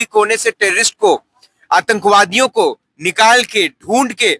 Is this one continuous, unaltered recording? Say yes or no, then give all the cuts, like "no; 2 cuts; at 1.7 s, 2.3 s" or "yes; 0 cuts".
yes; 0 cuts